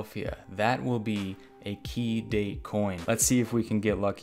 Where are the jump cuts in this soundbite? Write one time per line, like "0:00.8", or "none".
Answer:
0:03.0